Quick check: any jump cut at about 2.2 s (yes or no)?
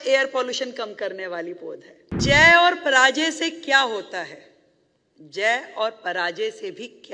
yes